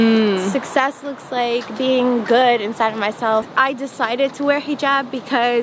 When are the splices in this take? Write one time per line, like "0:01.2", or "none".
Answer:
0:03.5